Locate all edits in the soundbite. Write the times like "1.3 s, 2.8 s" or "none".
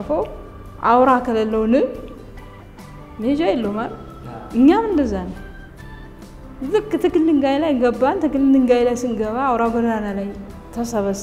none